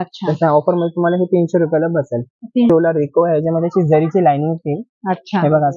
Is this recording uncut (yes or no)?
no